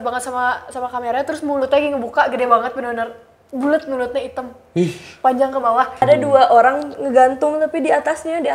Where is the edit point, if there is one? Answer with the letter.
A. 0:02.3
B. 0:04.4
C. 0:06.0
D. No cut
C